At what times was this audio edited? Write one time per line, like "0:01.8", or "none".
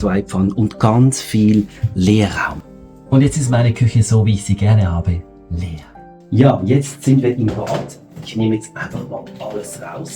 0:02.4
0:06.2

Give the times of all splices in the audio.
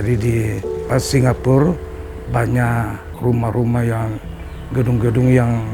0:00.8
0:03.1

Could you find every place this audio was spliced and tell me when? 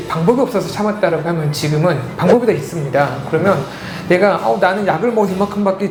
none

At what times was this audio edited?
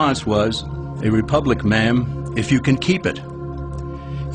none

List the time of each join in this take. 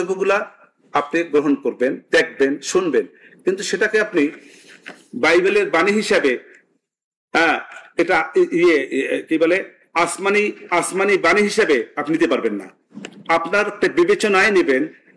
none

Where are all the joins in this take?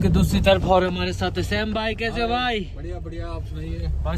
none

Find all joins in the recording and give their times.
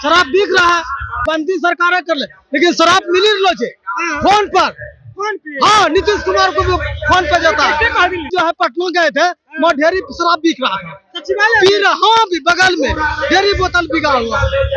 0:01.2
0:08.3

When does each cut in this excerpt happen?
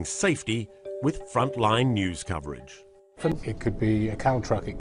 0:03.3

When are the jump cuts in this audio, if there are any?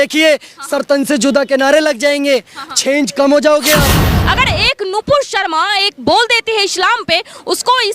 0:04.1

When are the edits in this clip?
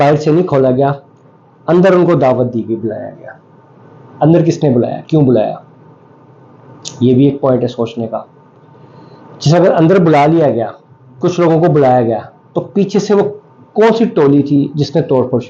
none

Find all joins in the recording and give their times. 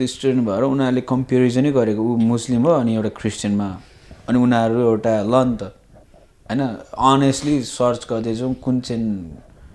none

